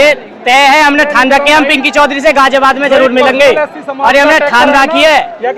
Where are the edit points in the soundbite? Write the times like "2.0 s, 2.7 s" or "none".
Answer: none